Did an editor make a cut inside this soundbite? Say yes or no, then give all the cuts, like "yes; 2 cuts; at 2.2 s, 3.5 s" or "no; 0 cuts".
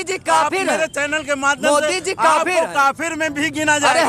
no; 0 cuts